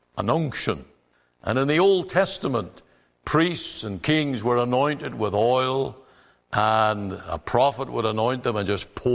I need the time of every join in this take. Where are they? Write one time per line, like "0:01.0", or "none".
none